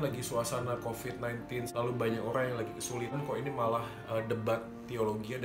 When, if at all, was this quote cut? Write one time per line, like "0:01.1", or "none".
0:01.7
0:03.2